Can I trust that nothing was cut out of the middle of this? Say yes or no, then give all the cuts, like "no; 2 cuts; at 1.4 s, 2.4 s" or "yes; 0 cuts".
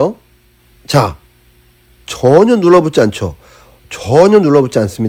yes; 0 cuts